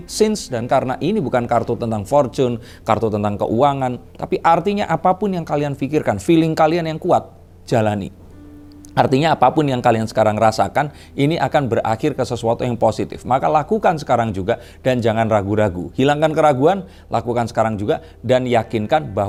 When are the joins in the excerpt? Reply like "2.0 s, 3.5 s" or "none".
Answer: none

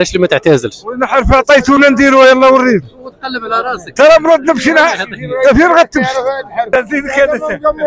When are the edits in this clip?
6.7 s

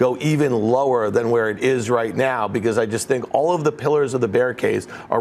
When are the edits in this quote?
none

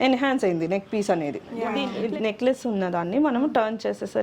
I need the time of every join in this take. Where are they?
1.8 s

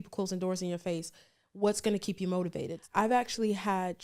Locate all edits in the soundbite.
2.7 s

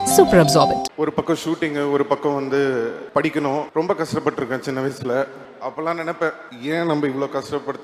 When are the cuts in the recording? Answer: 0.9 s, 3.0 s, 3.7 s, 5.4 s, 6.5 s

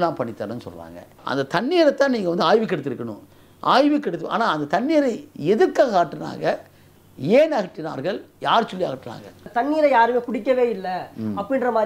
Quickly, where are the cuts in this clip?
1.2 s, 9.5 s

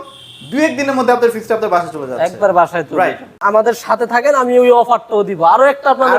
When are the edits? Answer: 3.4 s

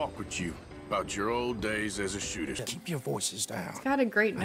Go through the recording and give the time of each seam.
2.6 s

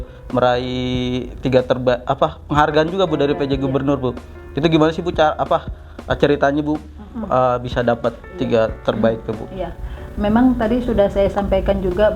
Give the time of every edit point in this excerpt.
none

